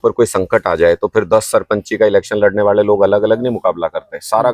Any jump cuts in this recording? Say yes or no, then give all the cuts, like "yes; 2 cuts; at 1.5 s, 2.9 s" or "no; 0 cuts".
no; 0 cuts